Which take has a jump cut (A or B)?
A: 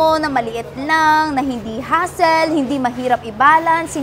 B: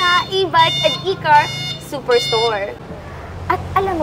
B